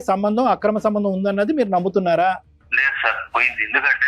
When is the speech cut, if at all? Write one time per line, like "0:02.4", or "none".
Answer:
0:02.5